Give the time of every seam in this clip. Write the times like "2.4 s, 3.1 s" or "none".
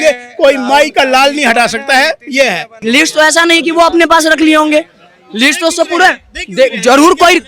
2.7 s